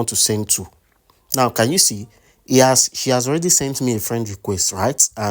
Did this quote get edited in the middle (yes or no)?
no